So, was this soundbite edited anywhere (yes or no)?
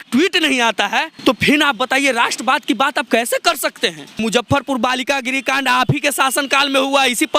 yes